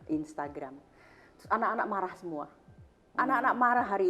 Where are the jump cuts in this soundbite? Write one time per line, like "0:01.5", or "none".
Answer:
none